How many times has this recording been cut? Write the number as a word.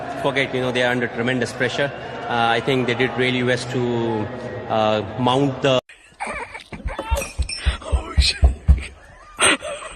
one